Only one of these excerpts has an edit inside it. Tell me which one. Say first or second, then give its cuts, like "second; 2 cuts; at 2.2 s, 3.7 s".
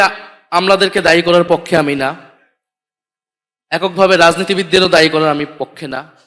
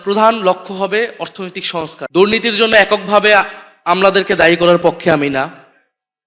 second; 1 cut; at 2.0 s